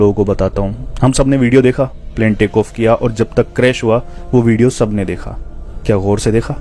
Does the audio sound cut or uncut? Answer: uncut